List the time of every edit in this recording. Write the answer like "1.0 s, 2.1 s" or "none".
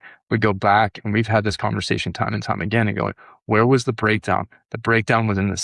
none